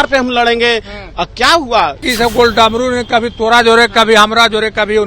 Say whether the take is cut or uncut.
cut